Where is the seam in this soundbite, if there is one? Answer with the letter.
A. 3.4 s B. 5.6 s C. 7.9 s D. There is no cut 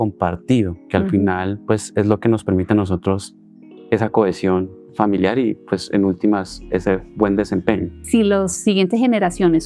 C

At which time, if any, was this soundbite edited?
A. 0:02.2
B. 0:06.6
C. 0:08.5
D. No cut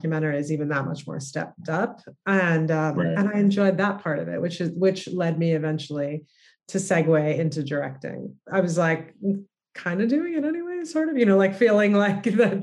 C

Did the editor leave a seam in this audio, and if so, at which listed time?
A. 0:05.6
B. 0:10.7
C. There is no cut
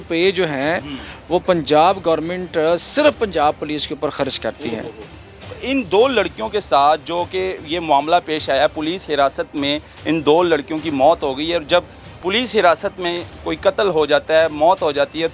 A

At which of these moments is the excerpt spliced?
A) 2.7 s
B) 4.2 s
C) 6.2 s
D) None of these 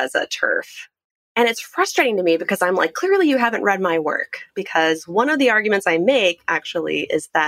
D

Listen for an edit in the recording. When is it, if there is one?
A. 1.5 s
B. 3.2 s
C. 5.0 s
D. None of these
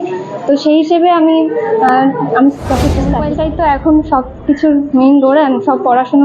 B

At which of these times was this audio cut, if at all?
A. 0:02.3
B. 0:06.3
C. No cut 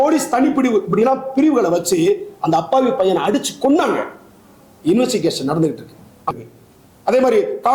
B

